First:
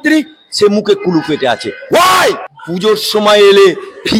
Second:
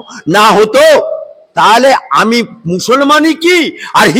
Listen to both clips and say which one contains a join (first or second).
first